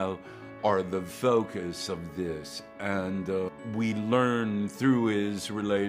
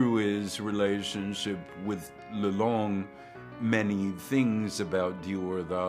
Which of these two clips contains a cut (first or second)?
first